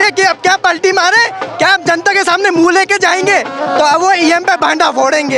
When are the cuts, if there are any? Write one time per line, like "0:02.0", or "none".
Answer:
none

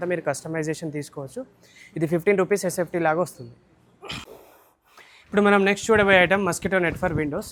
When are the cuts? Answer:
none

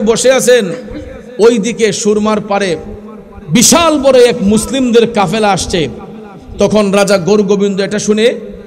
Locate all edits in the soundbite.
none

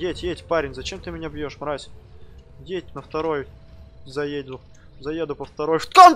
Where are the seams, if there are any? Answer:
none

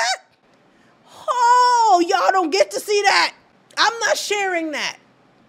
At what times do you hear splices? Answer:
none

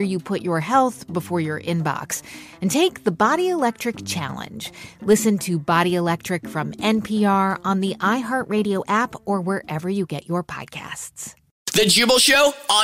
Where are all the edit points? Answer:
0:11.7

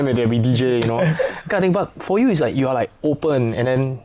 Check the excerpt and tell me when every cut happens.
none

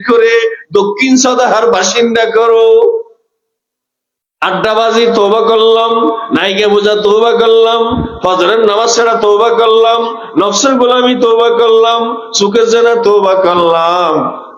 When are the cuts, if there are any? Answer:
none

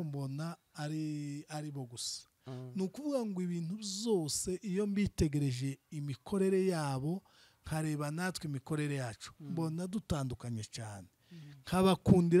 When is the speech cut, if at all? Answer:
none

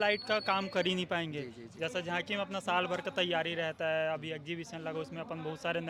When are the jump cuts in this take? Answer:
none

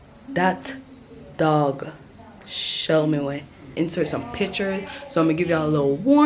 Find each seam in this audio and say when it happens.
0:03.7

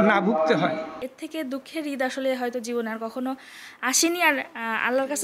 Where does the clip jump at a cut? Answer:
0:01.0

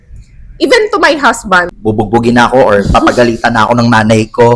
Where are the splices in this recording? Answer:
0:01.7

